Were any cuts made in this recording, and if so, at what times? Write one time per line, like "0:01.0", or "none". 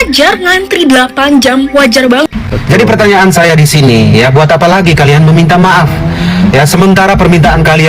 0:02.2